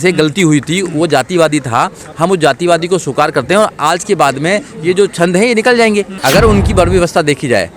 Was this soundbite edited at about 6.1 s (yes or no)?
yes